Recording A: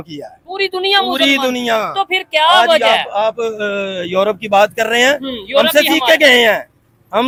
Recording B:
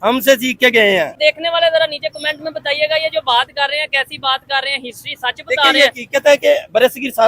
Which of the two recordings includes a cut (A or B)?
B